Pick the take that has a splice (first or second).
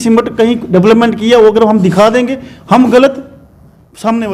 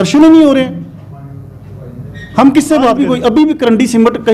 second